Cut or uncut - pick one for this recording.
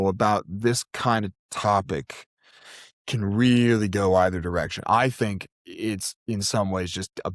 uncut